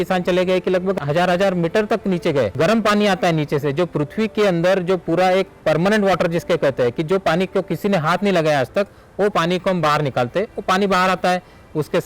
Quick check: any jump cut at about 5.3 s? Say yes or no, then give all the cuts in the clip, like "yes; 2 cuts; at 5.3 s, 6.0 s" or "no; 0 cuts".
no; 2 cuts; at 1.0 s, 2.5 s